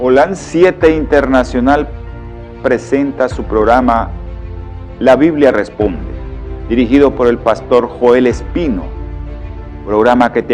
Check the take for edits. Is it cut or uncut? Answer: cut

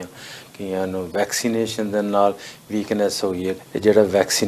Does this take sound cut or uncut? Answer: cut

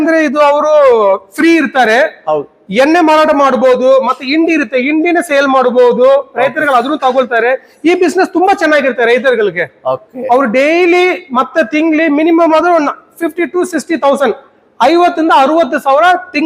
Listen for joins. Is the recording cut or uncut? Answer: uncut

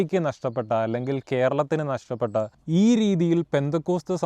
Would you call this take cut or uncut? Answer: cut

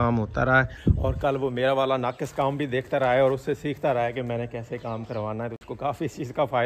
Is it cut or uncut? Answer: uncut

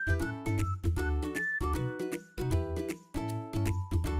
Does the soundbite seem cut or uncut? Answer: cut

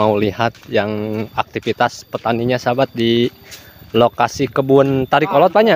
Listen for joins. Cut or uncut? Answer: uncut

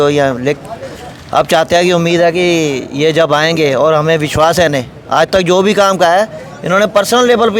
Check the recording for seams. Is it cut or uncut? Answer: uncut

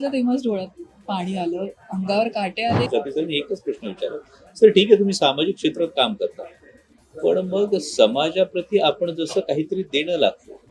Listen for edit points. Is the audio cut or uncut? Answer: cut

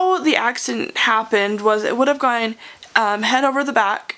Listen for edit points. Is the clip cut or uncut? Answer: uncut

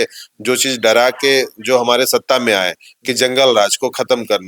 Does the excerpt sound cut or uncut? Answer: uncut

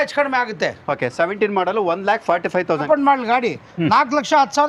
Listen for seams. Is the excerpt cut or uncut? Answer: cut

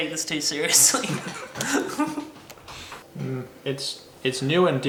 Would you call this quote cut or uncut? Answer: uncut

